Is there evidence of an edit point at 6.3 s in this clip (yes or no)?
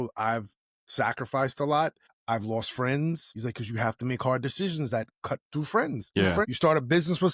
yes